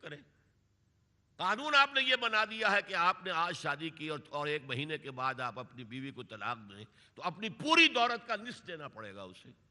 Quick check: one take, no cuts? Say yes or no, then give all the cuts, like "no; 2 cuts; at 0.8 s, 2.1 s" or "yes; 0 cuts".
yes; 0 cuts